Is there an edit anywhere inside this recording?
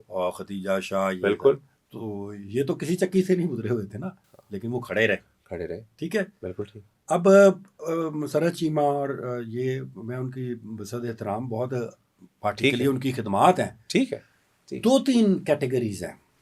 no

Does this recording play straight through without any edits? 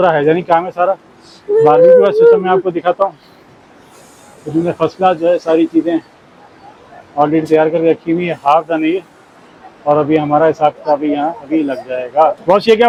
yes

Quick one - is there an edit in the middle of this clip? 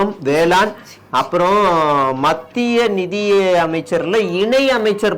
no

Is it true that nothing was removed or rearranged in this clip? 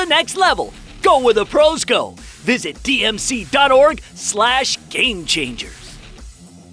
no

